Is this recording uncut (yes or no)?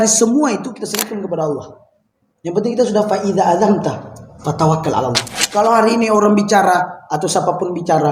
no